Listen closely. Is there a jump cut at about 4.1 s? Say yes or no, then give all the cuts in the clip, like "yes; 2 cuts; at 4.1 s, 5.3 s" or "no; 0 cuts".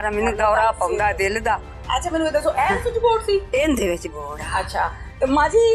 no; 1 cut; at 1.7 s